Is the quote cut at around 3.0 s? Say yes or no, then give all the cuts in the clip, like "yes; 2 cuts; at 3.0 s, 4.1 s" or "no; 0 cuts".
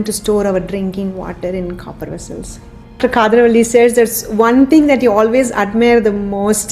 yes; 1 cut; at 3.0 s